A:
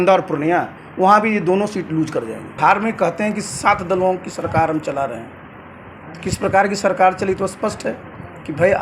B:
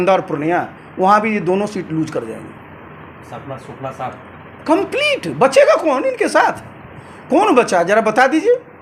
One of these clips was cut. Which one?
A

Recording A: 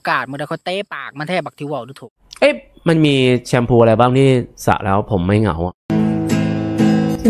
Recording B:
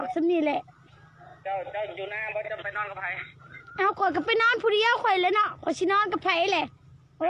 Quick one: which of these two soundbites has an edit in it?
A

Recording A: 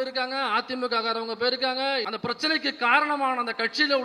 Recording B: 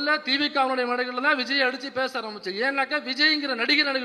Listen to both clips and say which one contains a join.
A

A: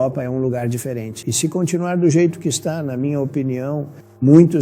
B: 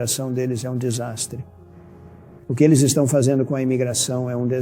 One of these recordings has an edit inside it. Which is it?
A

